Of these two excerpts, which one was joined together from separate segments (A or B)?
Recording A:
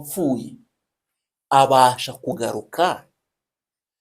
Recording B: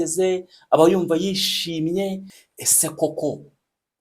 B